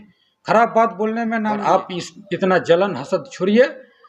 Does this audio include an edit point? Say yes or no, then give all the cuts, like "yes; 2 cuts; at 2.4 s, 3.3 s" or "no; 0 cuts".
yes; 1 cut; at 1.5 s